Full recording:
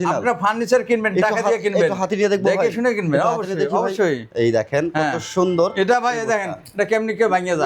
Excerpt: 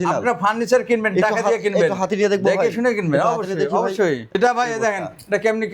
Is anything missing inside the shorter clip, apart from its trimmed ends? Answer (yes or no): yes